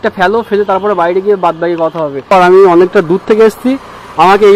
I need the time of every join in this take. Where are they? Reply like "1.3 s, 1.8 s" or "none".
2.3 s